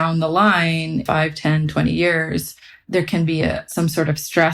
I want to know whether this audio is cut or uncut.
cut